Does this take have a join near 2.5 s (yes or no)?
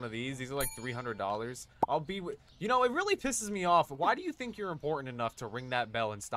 no